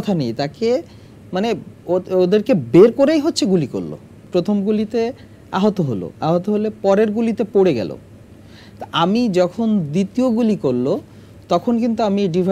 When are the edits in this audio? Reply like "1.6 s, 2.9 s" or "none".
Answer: 4.2 s